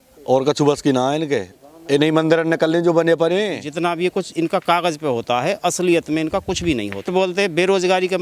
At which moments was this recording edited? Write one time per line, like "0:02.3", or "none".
0:03.7
0:07.1